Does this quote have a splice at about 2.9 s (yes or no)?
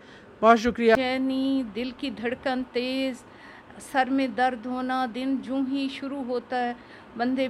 no